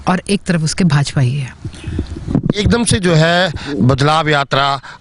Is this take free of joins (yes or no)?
yes